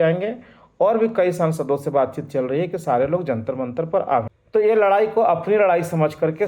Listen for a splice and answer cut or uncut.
cut